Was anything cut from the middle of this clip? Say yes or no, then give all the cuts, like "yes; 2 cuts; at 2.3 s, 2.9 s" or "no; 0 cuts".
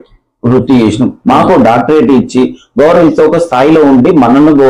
no; 0 cuts